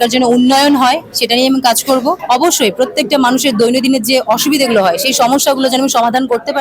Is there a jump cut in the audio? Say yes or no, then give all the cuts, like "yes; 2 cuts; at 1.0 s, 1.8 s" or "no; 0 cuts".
yes; 1 cut; at 2.2 s